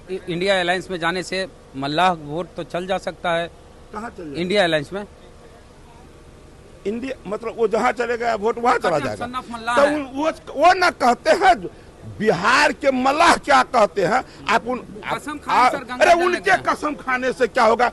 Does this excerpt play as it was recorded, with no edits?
yes; 0 cuts

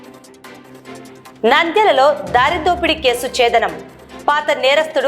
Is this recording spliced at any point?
yes; 1 cut; at 1.1 s

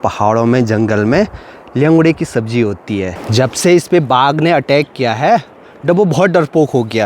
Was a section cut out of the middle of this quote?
yes; 1 cut; at 3.1 s

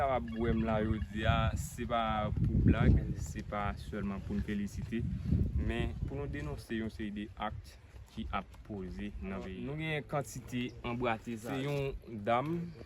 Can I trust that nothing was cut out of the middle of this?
no; 2 cuts; at 9.6 s, 11.5 s

